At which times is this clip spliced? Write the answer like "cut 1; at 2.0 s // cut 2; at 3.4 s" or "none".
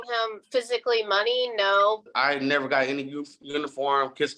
cut 1; at 2.1 s